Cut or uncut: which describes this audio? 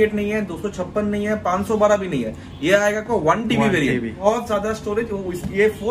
uncut